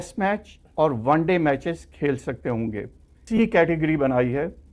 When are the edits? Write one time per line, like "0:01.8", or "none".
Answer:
0:03.2

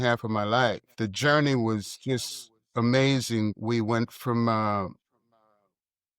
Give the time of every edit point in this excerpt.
0:00.9
0:03.6

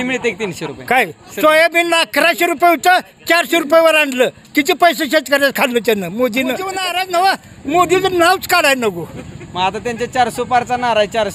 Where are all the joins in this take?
0:06.9

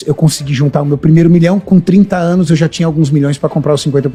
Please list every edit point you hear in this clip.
none

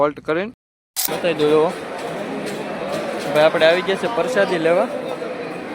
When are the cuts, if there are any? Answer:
0:01.1

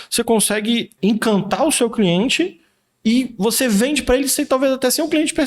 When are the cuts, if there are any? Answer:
0:00.9

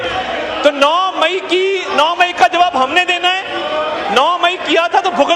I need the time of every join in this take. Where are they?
none

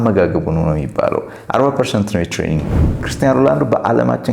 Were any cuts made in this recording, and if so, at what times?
0:03.1

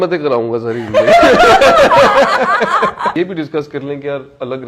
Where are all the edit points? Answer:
0:03.1

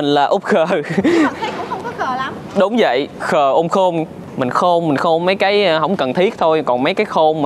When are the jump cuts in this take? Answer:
0:04.2

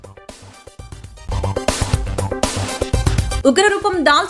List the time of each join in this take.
none

